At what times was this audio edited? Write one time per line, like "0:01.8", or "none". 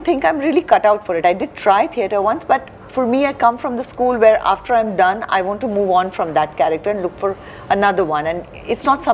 none